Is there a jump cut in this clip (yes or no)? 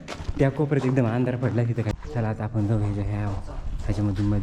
yes